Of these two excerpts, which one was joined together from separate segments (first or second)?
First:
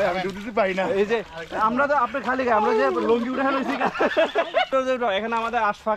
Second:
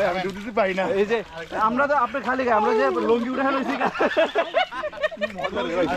first